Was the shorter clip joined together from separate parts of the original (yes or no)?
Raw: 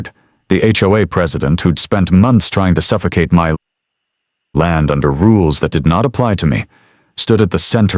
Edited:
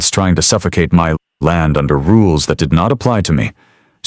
yes